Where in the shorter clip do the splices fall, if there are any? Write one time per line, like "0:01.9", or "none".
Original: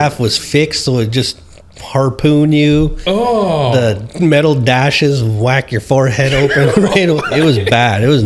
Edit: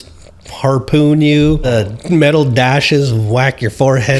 0:01.6